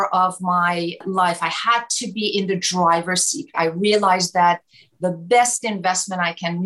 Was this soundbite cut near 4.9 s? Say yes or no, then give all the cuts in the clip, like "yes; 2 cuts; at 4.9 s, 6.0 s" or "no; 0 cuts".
no; 2 cuts; at 1.0 s, 3.5 s